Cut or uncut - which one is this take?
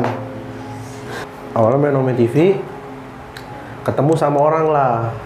cut